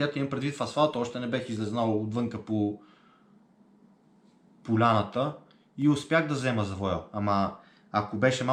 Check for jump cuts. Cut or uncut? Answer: uncut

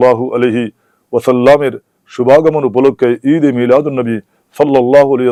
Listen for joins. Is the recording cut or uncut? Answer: uncut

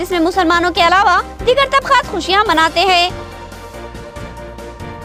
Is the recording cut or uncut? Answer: uncut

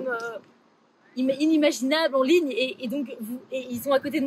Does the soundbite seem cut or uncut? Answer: uncut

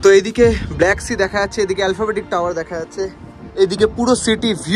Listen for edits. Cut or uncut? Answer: uncut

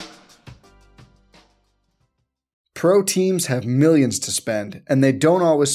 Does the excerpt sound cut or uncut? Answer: cut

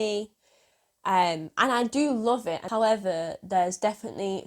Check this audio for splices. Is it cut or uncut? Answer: cut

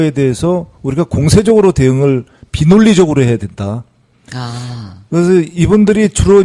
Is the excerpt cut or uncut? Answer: uncut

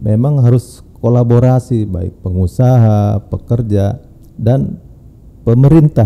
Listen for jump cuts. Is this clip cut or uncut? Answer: uncut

